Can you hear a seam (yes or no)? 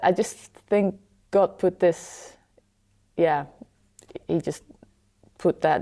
no